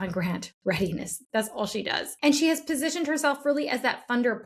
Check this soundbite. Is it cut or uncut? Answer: cut